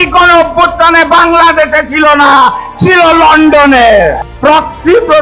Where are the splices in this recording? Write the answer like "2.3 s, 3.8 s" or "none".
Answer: 4.2 s